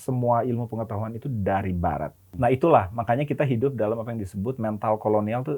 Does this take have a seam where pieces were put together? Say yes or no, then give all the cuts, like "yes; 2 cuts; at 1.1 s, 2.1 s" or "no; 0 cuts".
yes; 1 cut; at 2.2 s